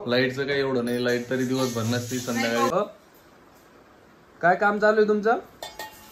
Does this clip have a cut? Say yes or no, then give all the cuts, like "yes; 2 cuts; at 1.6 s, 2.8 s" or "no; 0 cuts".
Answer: yes; 1 cut; at 2.7 s